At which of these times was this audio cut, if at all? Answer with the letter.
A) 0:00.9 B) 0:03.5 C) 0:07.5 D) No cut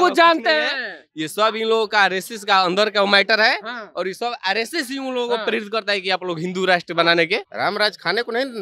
C